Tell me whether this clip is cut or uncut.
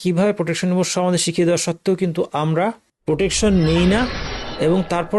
cut